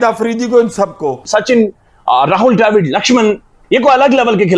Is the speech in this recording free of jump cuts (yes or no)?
no